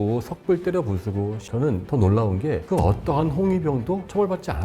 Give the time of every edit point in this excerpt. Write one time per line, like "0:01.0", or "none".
0:01.4